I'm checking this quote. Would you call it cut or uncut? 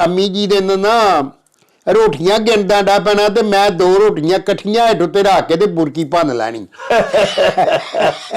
uncut